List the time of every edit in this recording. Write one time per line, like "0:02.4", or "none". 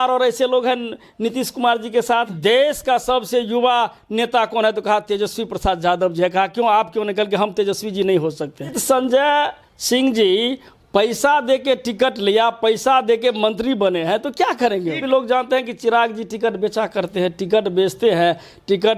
0:02.3
0:08.8
0:15.0